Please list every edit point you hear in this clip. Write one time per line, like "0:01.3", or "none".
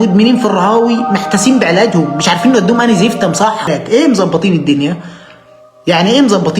0:03.7